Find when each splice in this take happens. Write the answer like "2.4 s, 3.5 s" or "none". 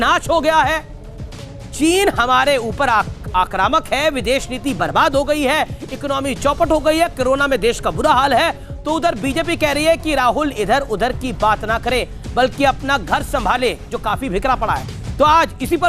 none